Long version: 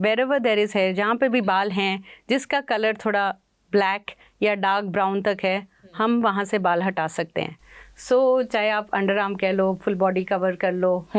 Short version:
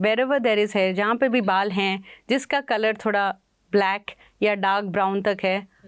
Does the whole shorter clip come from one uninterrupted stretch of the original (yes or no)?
yes